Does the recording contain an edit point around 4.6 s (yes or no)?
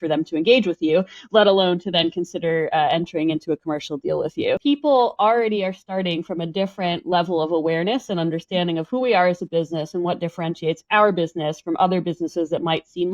yes